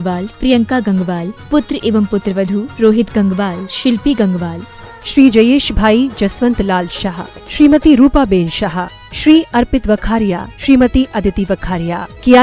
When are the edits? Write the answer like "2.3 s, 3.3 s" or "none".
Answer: none